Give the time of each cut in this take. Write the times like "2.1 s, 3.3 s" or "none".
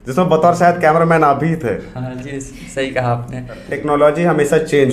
3.7 s

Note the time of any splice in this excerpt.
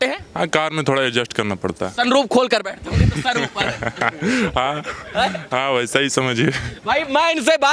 none

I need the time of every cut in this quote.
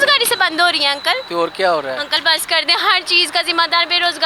none

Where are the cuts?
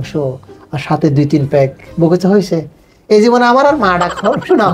none

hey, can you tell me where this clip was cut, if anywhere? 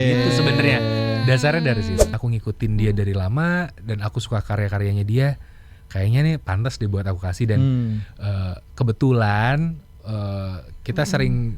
2.1 s

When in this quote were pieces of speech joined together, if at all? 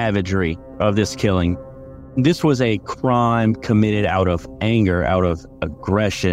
1.8 s

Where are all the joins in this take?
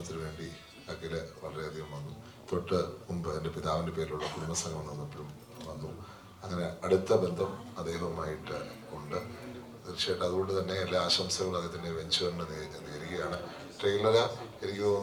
none

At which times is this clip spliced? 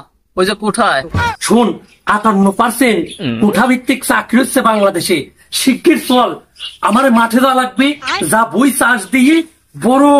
1.3 s

